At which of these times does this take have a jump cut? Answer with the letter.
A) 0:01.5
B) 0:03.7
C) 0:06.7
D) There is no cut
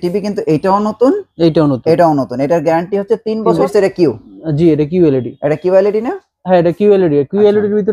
B